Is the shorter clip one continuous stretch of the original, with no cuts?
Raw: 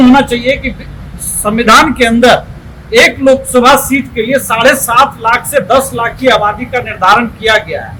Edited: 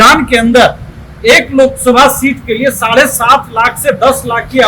yes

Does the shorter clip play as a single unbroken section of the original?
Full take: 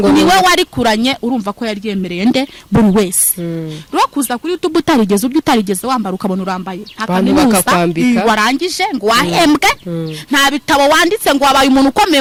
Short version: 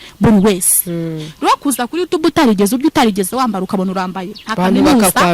yes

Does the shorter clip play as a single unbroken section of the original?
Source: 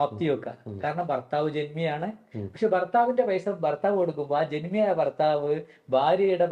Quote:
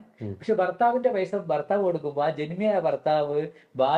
yes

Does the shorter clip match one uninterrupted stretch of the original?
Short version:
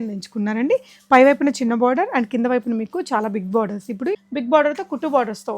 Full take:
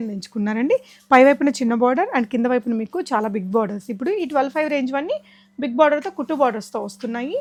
no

